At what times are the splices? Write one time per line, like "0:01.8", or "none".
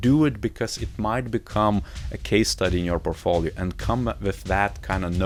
none

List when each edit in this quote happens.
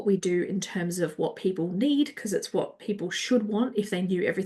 none

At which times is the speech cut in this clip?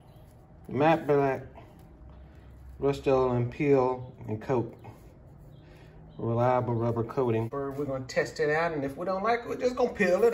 0:07.5

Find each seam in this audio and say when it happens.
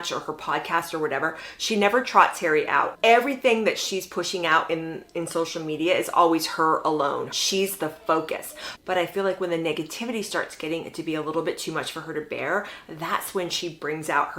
none

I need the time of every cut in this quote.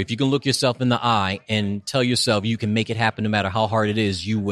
none

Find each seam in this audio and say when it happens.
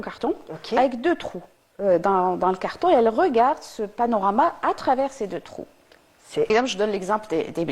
0:06.5

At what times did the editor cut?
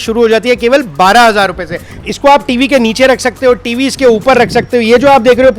0:01.9

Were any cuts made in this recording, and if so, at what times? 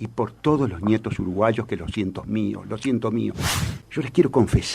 0:03.7

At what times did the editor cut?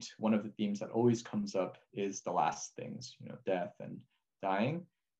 0:01.8

